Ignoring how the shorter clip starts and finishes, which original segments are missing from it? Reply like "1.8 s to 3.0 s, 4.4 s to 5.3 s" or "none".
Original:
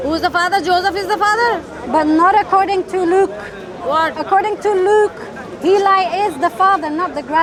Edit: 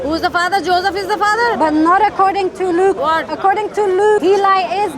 1.6 s to 1.9 s, 3.3 s to 3.9 s, 5.1 s to 5.6 s

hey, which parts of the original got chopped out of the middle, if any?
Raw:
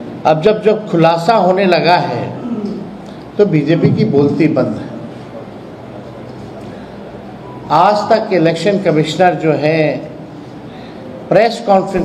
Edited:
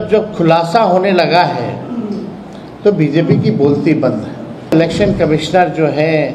5.3 s to 8.4 s

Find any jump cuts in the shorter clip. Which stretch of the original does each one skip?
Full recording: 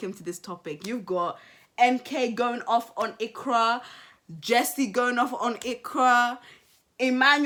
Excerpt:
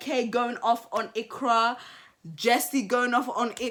none

